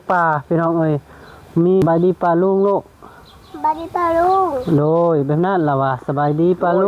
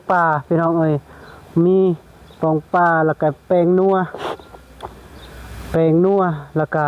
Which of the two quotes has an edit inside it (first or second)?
first